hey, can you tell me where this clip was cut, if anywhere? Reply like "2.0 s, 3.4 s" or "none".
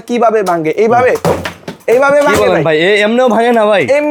none